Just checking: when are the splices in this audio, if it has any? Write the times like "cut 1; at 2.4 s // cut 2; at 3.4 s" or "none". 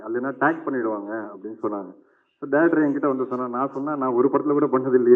none